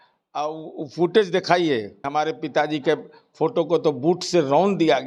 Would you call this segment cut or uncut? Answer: cut